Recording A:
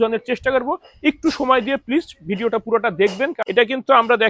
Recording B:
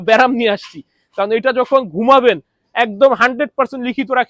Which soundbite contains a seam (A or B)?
A